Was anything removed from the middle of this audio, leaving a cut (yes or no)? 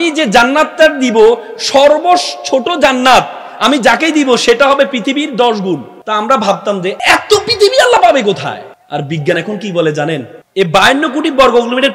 yes